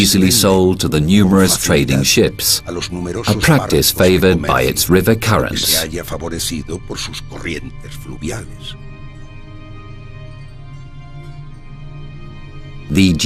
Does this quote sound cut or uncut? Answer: cut